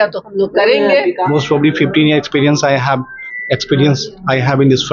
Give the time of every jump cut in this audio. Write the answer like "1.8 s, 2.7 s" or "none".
1.2 s